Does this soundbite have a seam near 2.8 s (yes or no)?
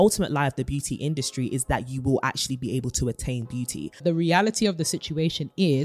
no